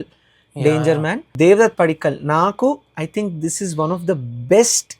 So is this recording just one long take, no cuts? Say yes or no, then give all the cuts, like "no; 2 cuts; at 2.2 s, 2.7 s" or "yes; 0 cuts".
no; 1 cut; at 1.3 s